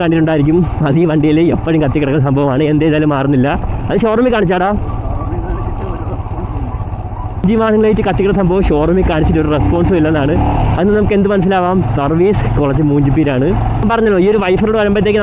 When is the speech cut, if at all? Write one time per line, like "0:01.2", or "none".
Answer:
none